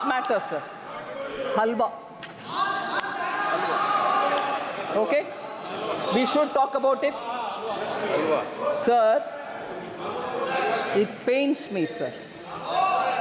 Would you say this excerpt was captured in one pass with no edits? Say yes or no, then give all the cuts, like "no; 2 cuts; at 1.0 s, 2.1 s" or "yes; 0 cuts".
yes; 0 cuts